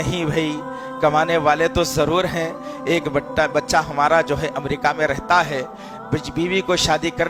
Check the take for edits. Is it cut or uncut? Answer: uncut